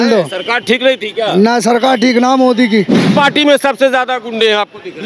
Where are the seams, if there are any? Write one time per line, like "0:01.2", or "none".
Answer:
0:03.0